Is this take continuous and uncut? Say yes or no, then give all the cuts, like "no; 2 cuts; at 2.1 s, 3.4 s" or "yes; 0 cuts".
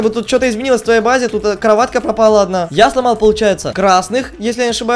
no; 1 cut; at 2.7 s